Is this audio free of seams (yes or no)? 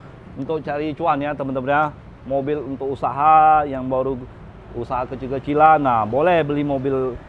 yes